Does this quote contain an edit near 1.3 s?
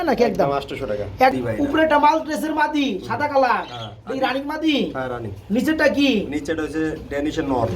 yes; 1 cut; at 1.3 s

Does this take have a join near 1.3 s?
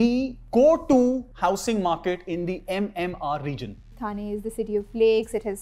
yes; 2 cuts; at 1.3 s, 4.0 s

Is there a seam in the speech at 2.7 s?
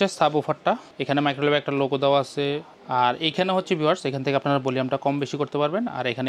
yes; 2 cuts; at 0.9 s, 2.7 s

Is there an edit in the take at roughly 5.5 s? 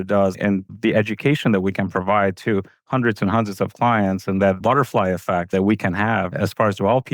yes; 1 cut; at 5.5 s

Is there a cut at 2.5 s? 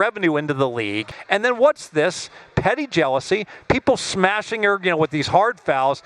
no; 1 cut; at 1.1 s

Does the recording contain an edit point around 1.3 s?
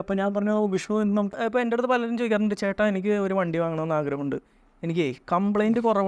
yes; 1 cut; at 1.3 s

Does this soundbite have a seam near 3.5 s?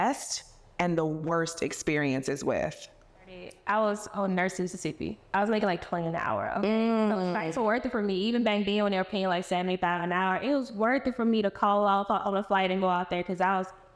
yes; 1 cut; at 3.5 s

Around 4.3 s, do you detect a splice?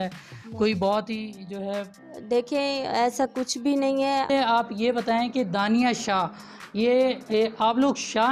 yes; 1 cut; at 4.3 s

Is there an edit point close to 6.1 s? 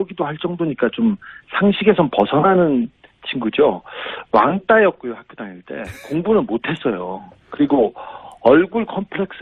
no; 0 cuts

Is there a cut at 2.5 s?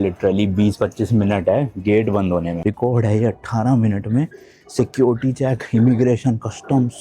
yes; 1 cut; at 2.5 s

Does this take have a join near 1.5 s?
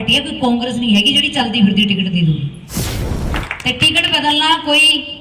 no; 1 cut; at 3.1 s

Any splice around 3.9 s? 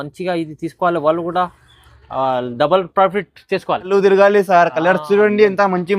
yes; 1 cut; at 3.9 s

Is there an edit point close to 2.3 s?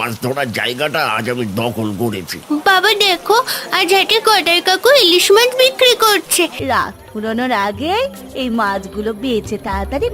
yes; 2 cuts; at 2.3 s, 6.6 s

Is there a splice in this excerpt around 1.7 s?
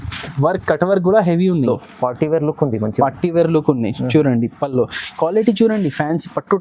yes; 1 cut; at 1.7 s

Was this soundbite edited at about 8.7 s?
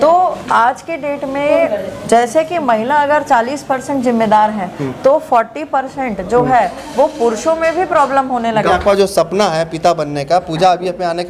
yes; 1 cut; at 8.7 s

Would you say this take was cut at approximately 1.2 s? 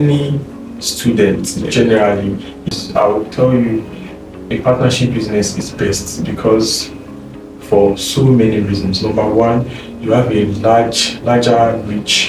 no; 1 cut; at 2.7 s

